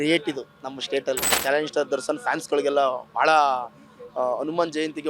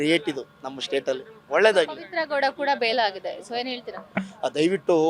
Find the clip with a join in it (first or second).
first